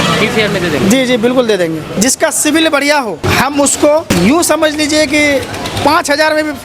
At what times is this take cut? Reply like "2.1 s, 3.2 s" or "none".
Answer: 1.9 s, 3.2 s, 4.1 s